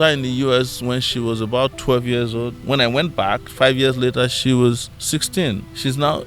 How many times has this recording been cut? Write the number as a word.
one